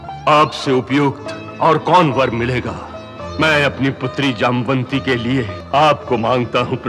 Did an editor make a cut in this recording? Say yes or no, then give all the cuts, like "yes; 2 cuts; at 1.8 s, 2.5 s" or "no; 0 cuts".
yes; 2 cuts; at 3.2 s, 5.6 s